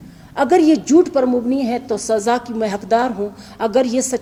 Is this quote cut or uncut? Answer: uncut